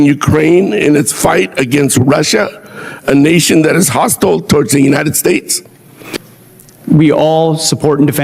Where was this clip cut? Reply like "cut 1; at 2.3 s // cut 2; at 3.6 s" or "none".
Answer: cut 1; at 6.2 s